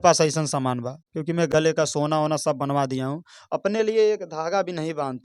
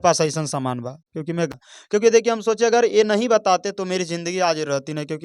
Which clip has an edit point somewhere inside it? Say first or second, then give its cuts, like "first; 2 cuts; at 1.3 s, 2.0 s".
second; 1 cut; at 1.5 s